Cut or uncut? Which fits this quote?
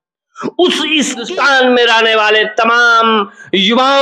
cut